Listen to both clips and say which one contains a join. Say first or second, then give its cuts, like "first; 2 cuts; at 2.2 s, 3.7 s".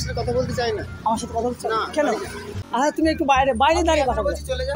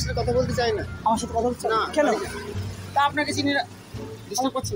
first; 1 cut; at 2.6 s